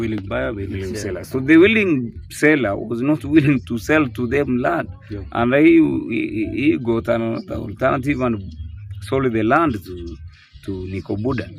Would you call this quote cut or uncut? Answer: uncut